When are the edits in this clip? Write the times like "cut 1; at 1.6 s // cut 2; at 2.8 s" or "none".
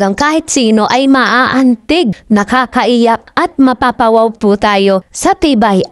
cut 1; at 2.2 s